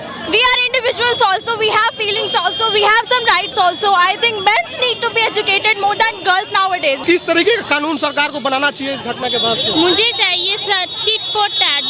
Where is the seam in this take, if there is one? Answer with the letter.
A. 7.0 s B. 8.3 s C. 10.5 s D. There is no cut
A